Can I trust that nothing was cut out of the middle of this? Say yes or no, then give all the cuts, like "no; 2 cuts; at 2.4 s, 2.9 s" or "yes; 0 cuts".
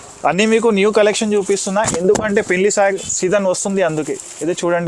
yes; 0 cuts